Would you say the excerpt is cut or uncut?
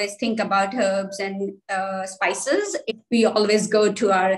cut